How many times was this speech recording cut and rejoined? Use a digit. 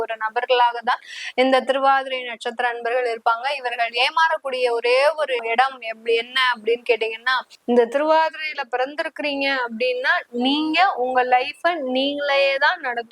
2